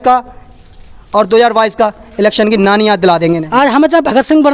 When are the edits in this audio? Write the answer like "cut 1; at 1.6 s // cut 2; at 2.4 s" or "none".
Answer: cut 1; at 3.4 s